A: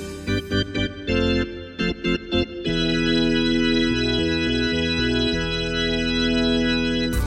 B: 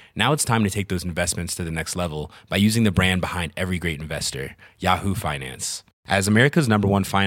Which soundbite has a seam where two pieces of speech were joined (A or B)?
A